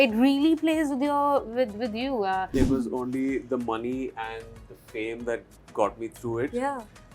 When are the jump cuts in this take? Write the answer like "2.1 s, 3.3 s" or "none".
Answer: 2.5 s